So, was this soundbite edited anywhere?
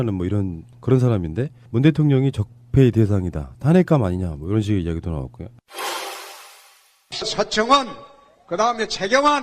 yes; 1 cut; at 3.9 s

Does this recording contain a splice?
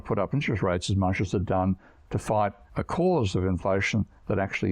yes; 1 cut; at 2.7 s

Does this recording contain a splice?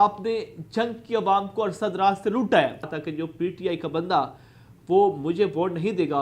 yes; 1 cut; at 3.0 s

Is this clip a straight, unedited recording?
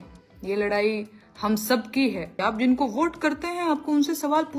no; 1 cut; at 2.3 s

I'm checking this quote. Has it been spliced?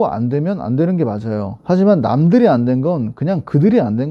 no; 0 cuts

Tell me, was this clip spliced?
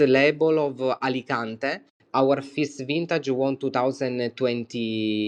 no; 0 cuts

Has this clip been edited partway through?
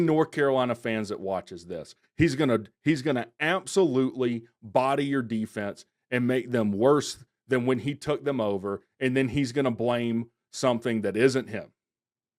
no; 0 cuts

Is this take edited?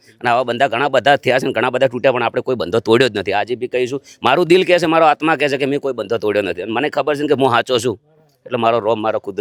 no; 0 cuts

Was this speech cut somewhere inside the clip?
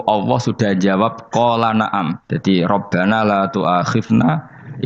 yes; 1 cut; at 2.2 s

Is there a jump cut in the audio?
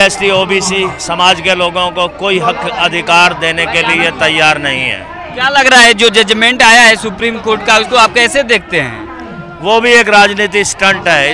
no; 0 cuts

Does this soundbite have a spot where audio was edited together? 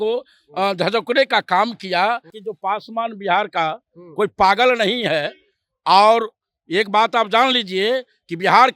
yes; 1 cut; at 2.4 s

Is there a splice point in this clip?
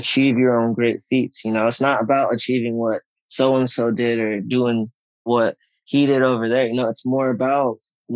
yes; 1 cut; at 5.2 s

